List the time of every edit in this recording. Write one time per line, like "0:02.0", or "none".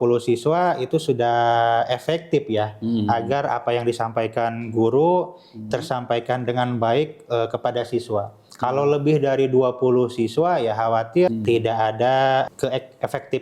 0:11.3
0:12.5